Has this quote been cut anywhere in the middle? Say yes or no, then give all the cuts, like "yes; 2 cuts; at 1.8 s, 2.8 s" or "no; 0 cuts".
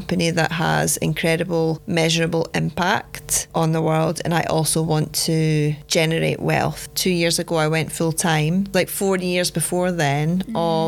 yes; 3 cuts; at 1.8 s, 6.9 s, 8.7 s